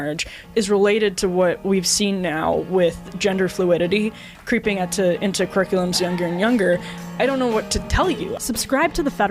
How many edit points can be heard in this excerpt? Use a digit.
1